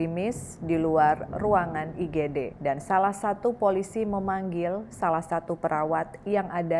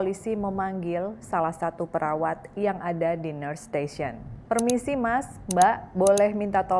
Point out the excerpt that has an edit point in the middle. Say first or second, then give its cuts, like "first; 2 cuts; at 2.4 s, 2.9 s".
first; 1 cut; at 2.5 s